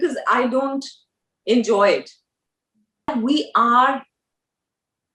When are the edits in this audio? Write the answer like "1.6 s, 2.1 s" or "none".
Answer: 3.1 s